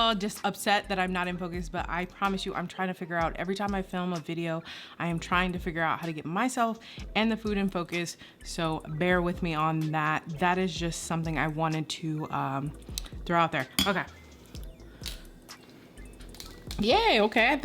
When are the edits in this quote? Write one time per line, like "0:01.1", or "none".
0:13.7